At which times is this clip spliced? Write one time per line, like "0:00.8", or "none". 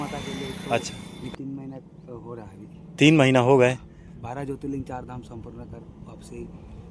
0:01.3